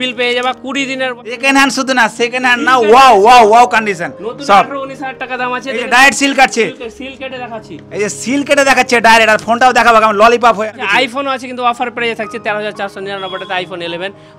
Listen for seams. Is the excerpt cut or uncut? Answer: cut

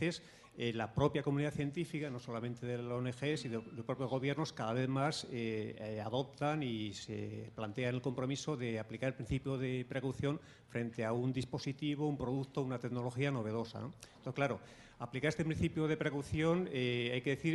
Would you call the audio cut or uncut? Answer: cut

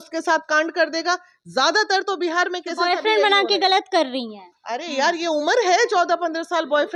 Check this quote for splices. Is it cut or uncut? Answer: uncut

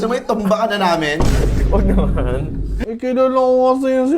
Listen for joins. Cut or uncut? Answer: cut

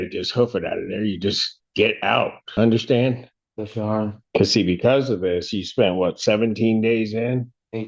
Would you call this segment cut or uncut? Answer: cut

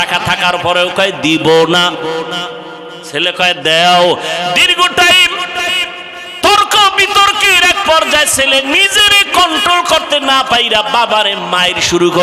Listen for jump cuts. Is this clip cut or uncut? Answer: uncut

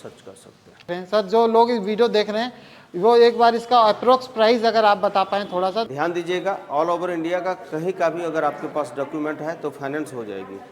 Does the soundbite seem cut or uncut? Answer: cut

